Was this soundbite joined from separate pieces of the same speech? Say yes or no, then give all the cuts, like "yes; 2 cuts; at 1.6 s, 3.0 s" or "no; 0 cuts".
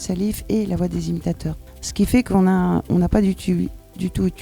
yes; 1 cut; at 1.8 s